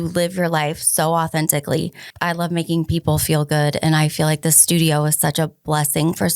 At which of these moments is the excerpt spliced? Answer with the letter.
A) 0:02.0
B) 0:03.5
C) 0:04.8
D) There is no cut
A